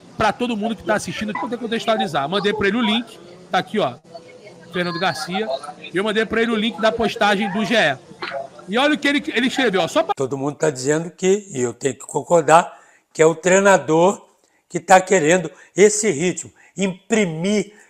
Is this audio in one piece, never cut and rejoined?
no; 2 cuts; at 1.4 s, 10.1 s

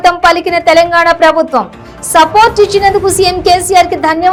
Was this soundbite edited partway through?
no; 0 cuts

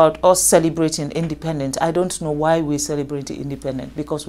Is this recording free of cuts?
yes; 0 cuts

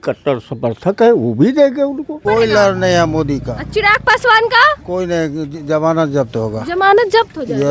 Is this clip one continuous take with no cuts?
no; 1 cut; at 2.2 s

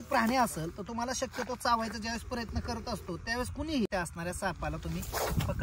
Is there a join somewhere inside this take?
yes; 1 cut; at 3.9 s

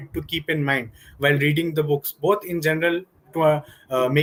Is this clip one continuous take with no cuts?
yes; 0 cuts

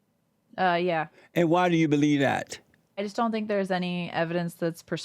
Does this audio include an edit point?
yes; 1 cut; at 3.1 s

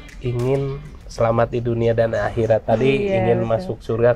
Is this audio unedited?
yes; 0 cuts

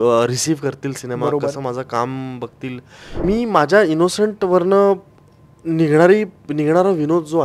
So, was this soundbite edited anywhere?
yes; 1 cut; at 3.2 s

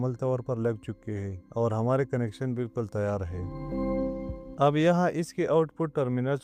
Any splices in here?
no; 0 cuts

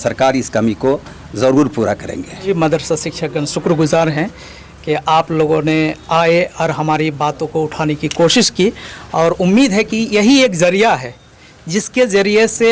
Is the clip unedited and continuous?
yes; 0 cuts

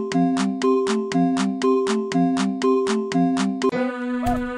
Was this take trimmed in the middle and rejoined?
no; 0 cuts

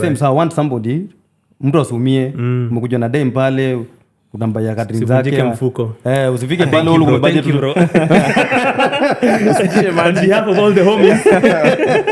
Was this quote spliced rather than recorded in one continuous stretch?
no; 0 cuts

